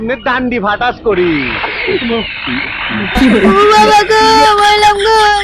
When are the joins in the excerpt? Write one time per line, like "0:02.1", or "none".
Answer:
0:03.1